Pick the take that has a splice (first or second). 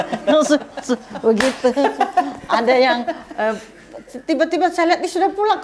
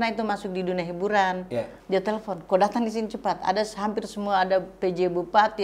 second